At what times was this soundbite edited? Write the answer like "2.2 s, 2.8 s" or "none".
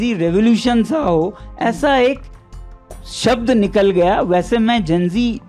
none